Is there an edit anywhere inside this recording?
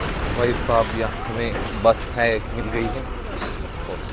no; 0 cuts

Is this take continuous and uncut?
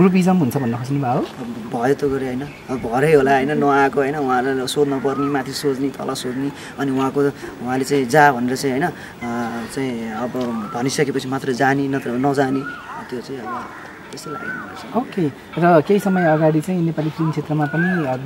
yes; 0 cuts

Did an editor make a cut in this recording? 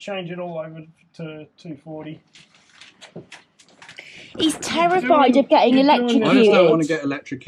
no; 0 cuts

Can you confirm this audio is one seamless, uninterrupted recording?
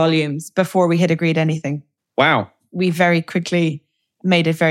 no; 1 cut; at 2.5 s

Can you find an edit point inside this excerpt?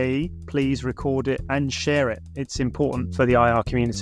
yes; 2 cuts; at 1.4 s, 3.1 s

